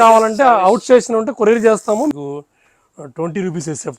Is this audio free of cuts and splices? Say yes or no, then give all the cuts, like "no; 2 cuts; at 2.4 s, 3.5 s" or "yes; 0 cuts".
no; 1 cut; at 2.1 s